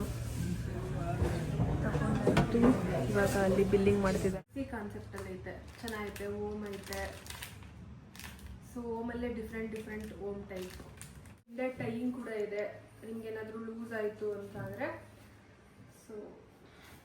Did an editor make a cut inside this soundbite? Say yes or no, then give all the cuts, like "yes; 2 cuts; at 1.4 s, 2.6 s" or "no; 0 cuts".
yes; 2 cuts; at 4.4 s, 11.5 s